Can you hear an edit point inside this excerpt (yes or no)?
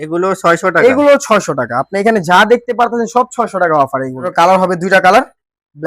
yes